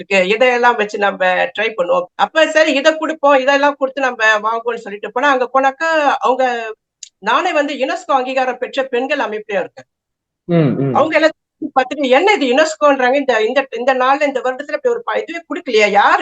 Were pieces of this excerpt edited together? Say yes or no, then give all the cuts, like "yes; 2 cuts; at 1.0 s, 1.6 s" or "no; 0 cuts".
yes; 1 cut; at 2.1 s